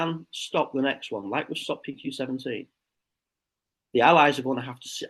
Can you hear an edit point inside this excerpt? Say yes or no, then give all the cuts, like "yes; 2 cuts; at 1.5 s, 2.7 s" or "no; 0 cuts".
no; 0 cuts